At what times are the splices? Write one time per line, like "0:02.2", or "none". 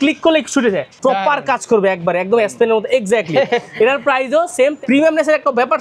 0:00.9
0:04.8